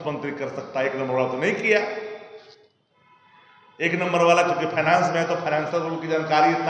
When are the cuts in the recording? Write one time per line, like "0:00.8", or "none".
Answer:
none

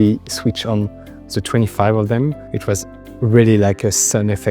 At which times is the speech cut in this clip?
0:02.5

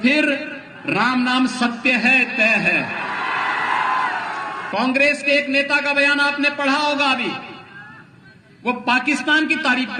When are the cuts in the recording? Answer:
0:04.6

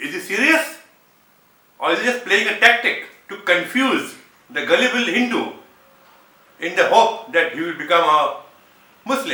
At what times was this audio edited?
none

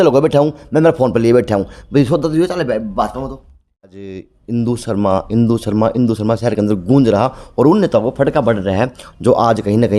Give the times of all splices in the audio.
0:04.0

